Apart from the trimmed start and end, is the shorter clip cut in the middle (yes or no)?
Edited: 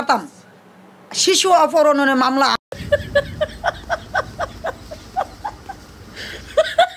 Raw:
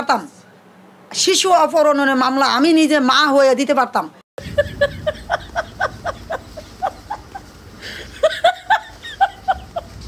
yes